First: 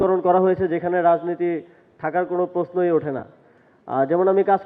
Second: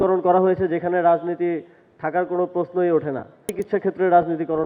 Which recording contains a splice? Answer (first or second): second